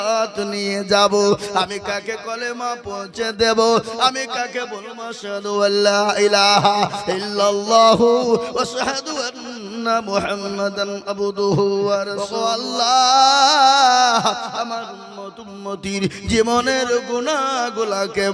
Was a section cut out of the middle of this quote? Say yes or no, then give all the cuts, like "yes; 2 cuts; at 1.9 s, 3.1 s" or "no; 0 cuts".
yes; 1 cut; at 12.4 s